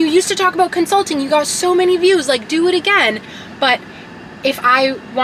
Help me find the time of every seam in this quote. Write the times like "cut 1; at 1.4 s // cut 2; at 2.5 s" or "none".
cut 1; at 3.4 s